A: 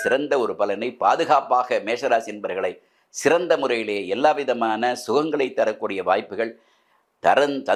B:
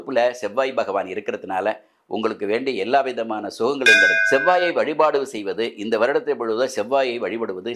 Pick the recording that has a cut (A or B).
B